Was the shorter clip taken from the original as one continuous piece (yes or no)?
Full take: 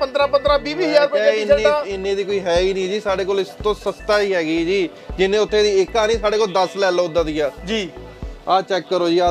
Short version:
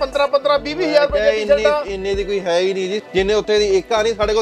no